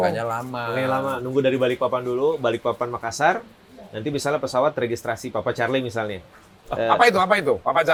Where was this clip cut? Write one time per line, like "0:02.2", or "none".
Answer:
none